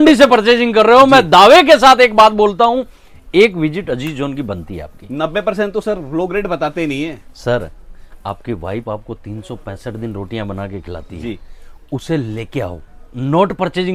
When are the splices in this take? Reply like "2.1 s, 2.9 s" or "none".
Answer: none